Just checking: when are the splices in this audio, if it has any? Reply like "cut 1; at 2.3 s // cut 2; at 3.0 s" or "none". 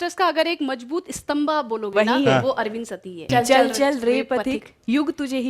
cut 1; at 3.2 s